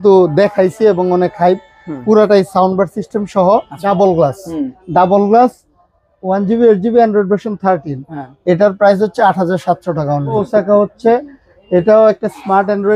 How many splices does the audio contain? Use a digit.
2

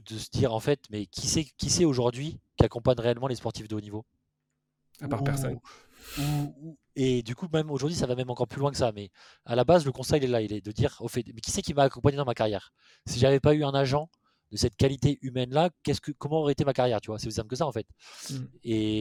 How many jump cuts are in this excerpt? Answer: 0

